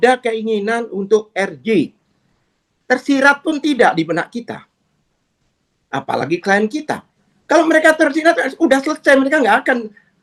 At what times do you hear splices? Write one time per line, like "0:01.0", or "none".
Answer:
none